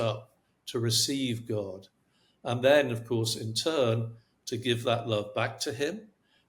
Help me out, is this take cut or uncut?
uncut